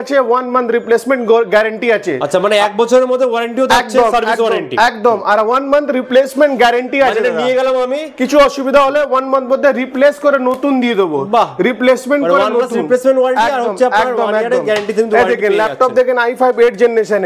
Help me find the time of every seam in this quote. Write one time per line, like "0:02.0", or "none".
none